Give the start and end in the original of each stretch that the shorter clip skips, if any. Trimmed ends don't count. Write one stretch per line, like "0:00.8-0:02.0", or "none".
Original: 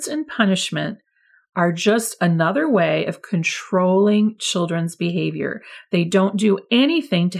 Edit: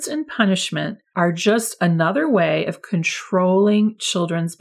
0:01.0-0:01.4